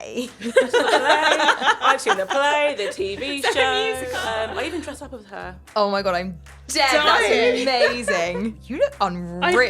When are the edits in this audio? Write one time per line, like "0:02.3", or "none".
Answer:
0:04.1
0:05.5